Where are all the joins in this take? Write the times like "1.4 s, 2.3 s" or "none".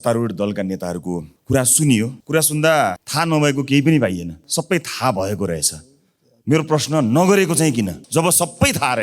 1.3 s, 2.2 s, 3.0 s, 4.4 s, 8.0 s